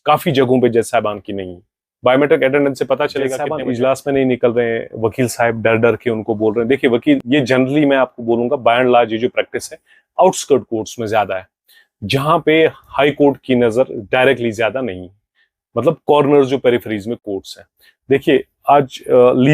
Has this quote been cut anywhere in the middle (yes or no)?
yes